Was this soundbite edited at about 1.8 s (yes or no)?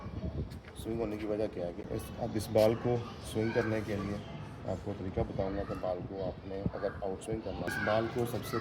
yes